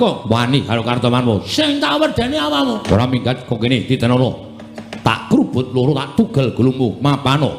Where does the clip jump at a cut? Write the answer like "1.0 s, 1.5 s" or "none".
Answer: 2.8 s